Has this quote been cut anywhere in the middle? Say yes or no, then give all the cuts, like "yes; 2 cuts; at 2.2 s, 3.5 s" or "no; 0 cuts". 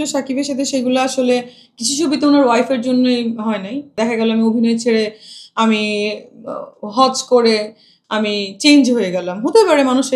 yes; 1 cut; at 4.0 s